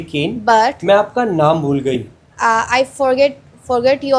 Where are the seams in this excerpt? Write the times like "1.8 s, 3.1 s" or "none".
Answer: none